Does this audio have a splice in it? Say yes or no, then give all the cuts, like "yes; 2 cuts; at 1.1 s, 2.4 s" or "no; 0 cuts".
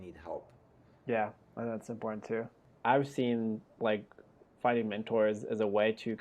yes; 1 cut; at 2.6 s